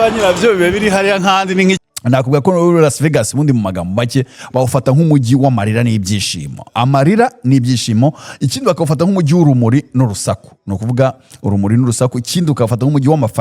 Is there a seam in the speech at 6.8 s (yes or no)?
no